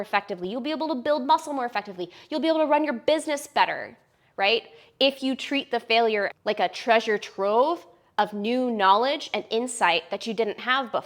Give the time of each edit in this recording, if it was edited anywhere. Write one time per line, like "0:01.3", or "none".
0:06.3